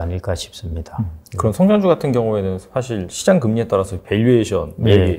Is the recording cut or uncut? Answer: uncut